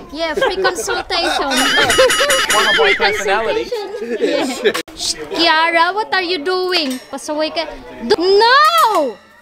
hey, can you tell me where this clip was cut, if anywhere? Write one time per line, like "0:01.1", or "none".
0:04.9
0:08.1

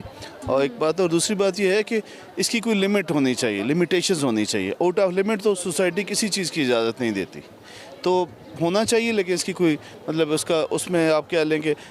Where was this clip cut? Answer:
none

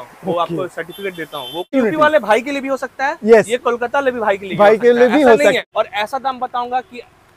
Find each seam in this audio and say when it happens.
0:01.7
0:05.6

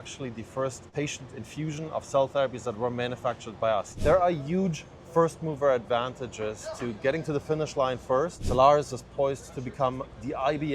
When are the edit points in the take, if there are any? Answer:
0:00.9
0:03.9
0:08.4

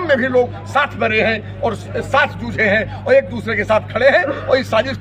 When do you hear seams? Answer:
none

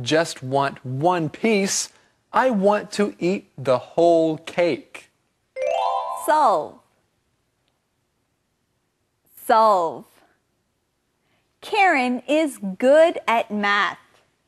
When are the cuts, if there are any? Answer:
0:02.6

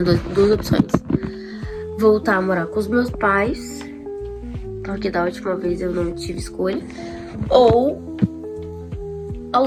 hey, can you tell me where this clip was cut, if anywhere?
none

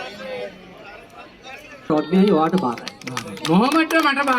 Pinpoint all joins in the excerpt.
0:01.9

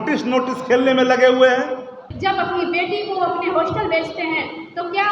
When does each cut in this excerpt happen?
0:02.1

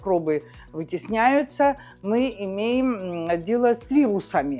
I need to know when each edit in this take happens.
none

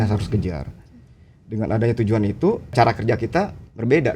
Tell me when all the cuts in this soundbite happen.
0:02.7

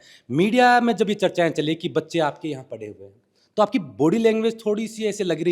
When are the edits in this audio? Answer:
none

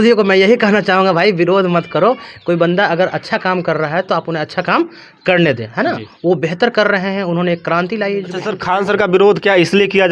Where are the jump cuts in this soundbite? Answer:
0:08.5

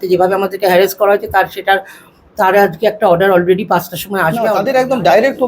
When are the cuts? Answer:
0:04.6

